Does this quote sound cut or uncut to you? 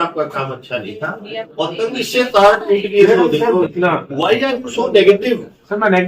cut